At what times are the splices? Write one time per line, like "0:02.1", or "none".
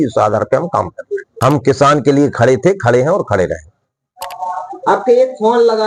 0:01.2
0:04.1